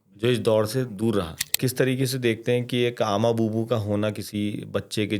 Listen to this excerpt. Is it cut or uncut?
cut